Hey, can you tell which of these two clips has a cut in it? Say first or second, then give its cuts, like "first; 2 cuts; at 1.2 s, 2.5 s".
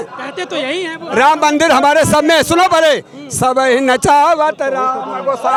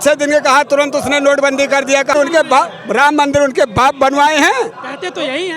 second; 1 cut; at 2.1 s